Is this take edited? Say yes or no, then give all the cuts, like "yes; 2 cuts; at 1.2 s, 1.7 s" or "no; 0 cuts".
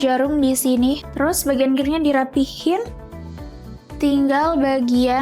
yes; 1 cut; at 1.1 s